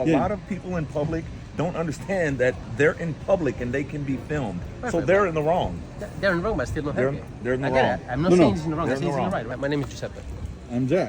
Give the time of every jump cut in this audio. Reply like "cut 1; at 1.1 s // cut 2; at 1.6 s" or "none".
cut 1; at 9.4 s